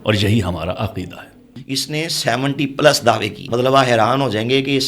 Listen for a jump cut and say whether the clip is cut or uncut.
cut